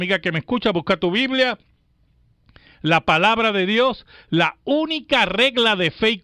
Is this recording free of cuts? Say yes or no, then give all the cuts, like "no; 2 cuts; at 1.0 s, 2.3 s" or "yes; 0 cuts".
no; 1 cut; at 1.7 s